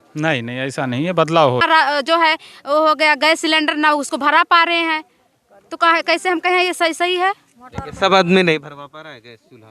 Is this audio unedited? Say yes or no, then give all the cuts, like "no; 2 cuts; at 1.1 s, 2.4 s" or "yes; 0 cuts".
no; 1 cut; at 1.6 s